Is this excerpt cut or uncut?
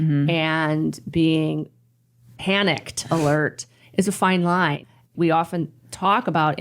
cut